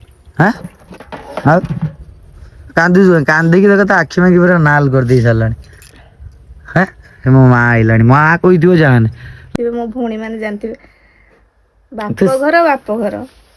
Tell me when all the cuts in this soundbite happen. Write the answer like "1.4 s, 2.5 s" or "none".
9.4 s